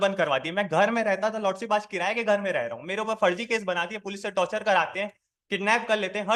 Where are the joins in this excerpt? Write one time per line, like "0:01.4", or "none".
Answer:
none